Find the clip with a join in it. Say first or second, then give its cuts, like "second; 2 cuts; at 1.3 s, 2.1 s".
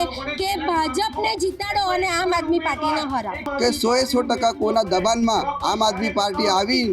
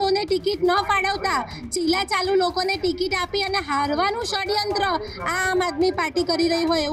first; 1 cut; at 3.4 s